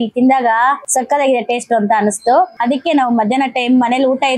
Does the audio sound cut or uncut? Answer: cut